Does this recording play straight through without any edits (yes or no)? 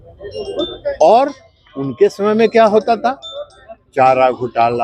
yes